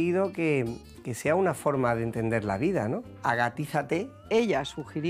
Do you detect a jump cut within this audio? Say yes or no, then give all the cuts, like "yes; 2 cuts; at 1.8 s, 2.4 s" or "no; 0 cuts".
yes; 2 cuts; at 3.1 s, 4.3 s